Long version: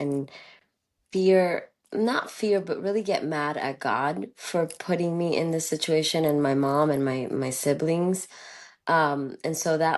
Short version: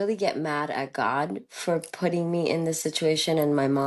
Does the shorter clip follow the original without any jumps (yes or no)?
yes